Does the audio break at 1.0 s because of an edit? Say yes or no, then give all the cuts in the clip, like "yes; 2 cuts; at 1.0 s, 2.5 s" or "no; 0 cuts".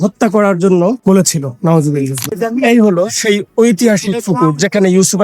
yes; 2 cuts; at 1.0 s, 2.3 s